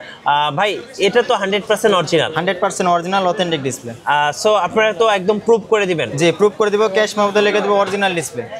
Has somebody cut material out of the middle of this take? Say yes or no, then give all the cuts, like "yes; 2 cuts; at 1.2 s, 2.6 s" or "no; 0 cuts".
no; 0 cuts